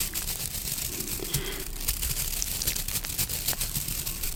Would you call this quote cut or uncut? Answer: uncut